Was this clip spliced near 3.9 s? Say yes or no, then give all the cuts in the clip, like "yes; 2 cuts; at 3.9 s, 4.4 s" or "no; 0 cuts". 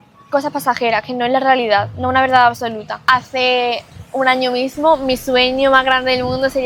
yes; 2 cuts; at 3.0 s, 3.9 s